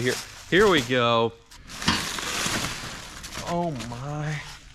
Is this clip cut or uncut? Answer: cut